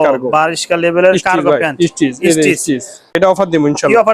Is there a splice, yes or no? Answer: yes